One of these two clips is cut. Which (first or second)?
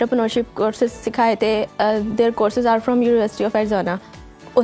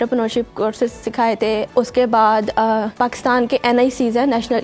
second